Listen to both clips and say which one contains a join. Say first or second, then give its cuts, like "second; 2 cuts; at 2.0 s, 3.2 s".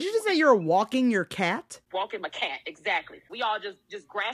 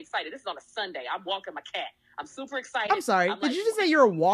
first; 2 cuts; at 1.8 s, 3.2 s